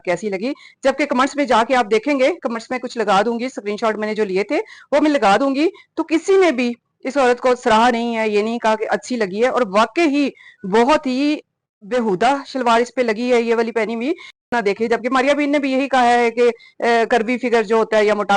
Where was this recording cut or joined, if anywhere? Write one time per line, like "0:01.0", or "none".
0:14.5